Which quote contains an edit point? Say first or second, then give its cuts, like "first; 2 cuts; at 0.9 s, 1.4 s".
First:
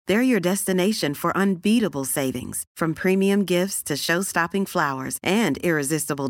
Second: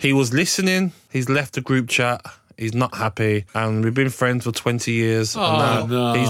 second; 2 cuts; at 1.0 s, 3.5 s